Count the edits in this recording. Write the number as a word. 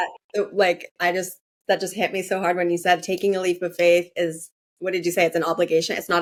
zero